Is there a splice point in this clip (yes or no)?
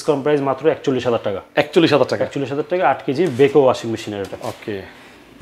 no